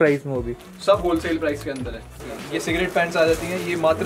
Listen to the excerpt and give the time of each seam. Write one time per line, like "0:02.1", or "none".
0:02.2